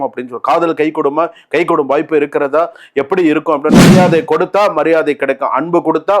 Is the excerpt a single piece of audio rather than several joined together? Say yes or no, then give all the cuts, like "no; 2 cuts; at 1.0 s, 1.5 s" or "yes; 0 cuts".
no; 1 cut; at 3.9 s